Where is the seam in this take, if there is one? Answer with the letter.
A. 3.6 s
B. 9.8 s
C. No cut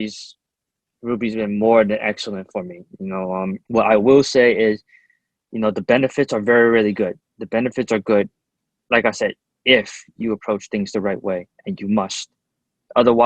A